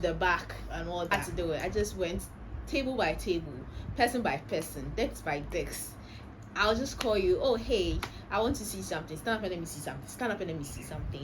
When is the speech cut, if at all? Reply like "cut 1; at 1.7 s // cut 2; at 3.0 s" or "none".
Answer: cut 1; at 1.1 s